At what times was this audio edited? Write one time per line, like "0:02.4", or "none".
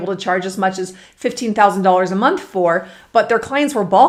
none